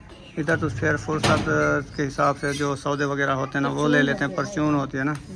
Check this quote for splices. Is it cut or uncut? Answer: uncut